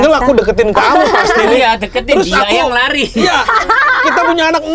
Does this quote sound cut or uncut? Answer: uncut